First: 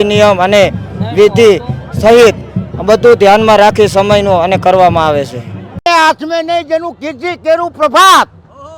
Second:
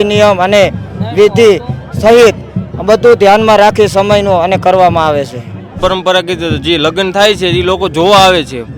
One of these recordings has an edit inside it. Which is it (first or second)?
second